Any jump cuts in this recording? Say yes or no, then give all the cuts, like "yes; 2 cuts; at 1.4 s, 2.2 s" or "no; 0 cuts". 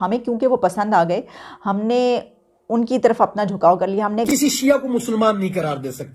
yes; 1 cut; at 4.3 s